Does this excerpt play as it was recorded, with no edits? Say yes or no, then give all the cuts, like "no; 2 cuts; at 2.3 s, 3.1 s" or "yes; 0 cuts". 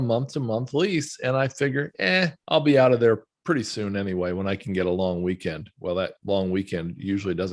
yes; 0 cuts